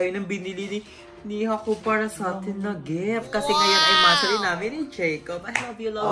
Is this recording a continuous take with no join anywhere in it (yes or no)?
yes